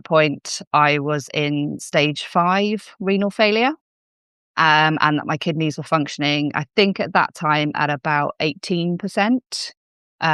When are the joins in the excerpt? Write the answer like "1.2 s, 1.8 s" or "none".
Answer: none